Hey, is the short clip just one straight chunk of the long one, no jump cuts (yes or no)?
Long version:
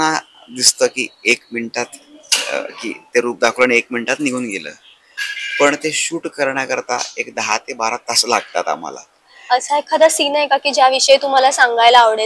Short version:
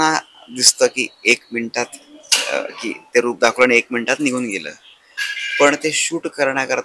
yes